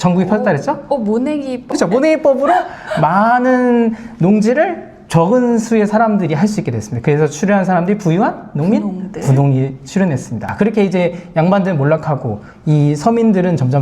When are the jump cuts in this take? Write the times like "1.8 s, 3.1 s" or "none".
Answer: 1.7 s, 10.5 s

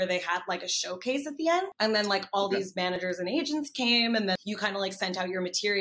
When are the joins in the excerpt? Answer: 1.7 s, 4.4 s

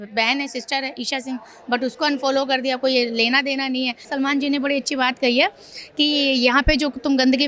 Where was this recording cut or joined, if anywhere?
4.1 s

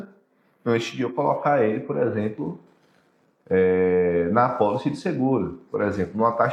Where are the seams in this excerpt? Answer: none

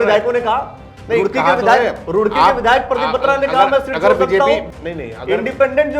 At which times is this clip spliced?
4.7 s

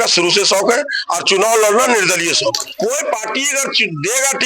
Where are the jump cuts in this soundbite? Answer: 2.7 s

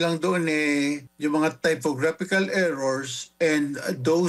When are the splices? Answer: 1.1 s

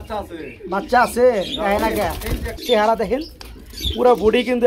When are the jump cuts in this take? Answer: 2.7 s

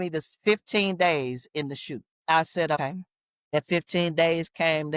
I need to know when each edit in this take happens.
2.1 s, 2.8 s

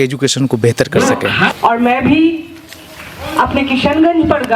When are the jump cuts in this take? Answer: 1.5 s

